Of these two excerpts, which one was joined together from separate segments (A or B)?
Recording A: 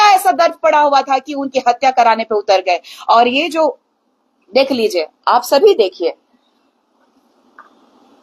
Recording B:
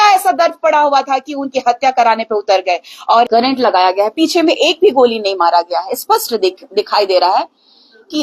B